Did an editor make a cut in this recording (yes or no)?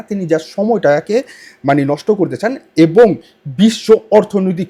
no